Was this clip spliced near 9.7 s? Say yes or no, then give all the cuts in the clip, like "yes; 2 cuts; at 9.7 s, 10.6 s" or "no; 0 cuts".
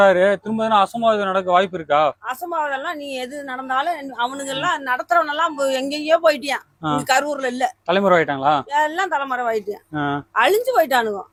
no; 0 cuts